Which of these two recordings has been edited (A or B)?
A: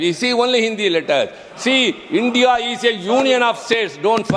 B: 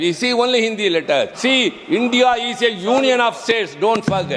B